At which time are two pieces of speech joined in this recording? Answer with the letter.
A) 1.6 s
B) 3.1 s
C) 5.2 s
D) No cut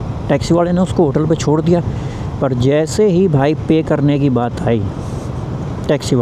D